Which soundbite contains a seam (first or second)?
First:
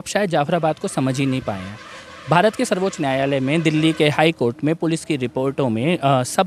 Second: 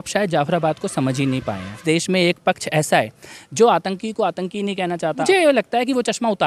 second